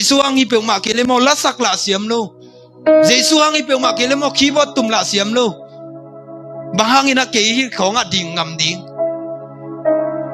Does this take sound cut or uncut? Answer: uncut